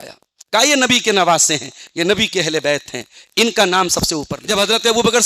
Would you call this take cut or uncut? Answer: cut